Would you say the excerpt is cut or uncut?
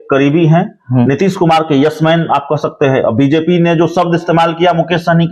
uncut